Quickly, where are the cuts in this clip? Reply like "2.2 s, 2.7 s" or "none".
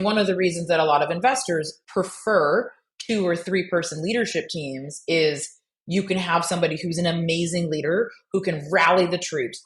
1.8 s